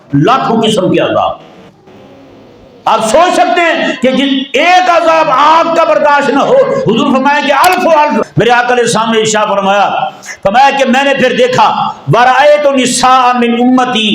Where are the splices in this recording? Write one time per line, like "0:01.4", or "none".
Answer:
0:08.3